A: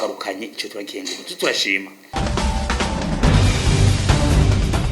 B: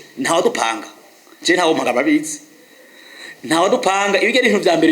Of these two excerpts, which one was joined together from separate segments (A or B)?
A